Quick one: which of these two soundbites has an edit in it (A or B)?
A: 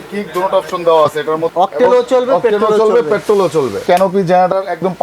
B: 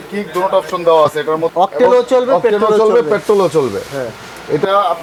A